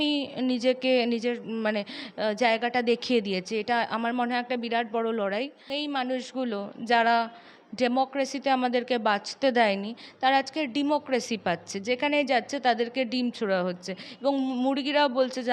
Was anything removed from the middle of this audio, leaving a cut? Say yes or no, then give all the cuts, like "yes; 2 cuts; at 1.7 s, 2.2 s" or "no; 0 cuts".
yes; 1 cut; at 5.7 s